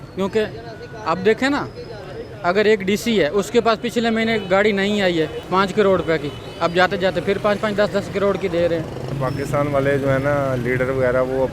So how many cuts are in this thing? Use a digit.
2